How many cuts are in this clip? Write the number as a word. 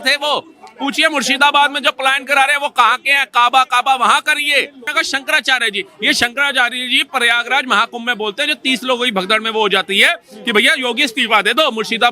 one